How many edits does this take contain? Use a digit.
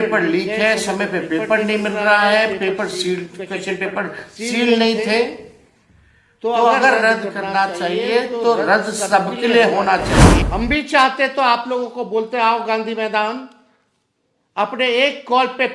1